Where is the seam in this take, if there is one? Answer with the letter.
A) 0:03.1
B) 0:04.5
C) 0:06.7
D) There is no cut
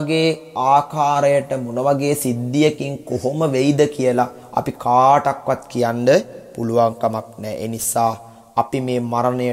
B